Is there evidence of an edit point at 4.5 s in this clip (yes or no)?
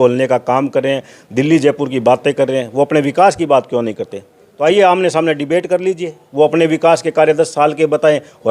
yes